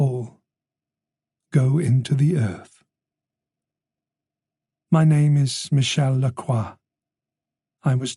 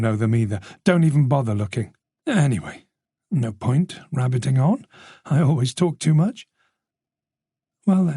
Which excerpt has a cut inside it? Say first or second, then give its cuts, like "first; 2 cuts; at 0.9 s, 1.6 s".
second; 1 cut; at 7.0 s